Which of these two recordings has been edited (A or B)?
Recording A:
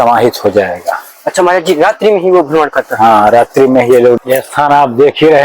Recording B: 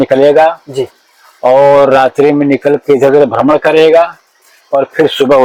A